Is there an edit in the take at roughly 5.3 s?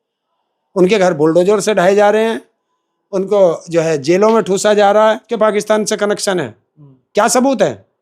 yes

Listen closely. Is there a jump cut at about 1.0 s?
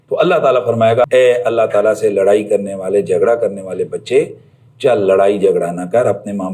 yes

